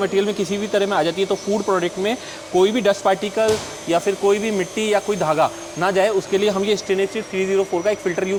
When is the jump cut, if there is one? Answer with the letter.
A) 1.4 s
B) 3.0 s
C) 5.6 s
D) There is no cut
D